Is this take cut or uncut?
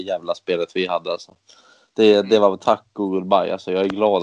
uncut